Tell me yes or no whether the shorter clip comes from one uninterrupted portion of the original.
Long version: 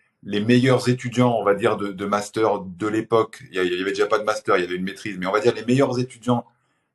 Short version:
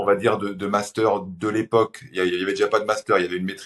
yes